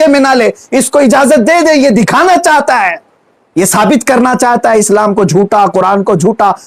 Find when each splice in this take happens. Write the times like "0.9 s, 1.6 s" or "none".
none

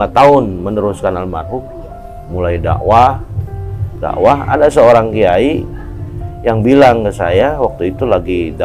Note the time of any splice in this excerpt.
none

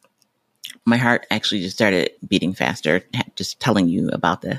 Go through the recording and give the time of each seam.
2.2 s

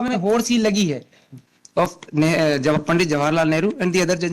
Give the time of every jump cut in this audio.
1.3 s

